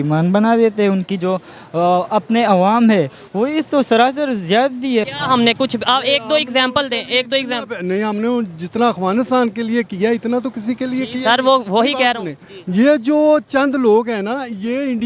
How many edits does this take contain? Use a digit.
1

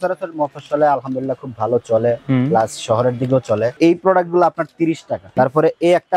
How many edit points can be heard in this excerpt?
2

